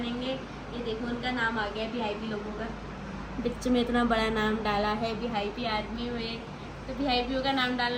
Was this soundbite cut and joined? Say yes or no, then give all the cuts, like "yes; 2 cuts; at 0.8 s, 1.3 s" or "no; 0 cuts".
no; 0 cuts